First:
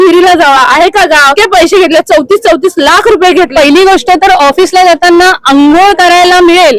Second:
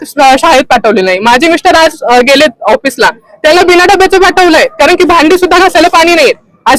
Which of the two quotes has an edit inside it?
first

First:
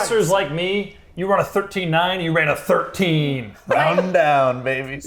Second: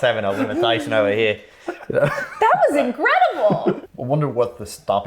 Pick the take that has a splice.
second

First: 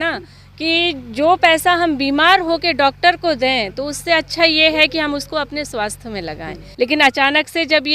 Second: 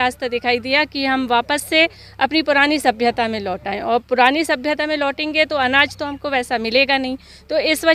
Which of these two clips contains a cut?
first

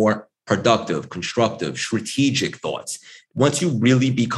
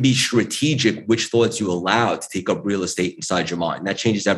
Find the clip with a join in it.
first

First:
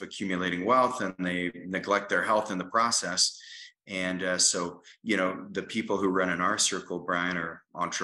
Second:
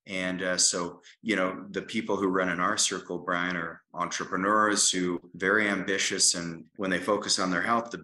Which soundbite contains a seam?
second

